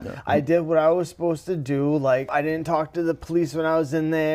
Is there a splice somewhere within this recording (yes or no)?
yes